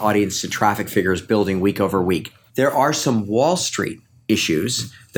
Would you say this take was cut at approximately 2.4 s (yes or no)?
yes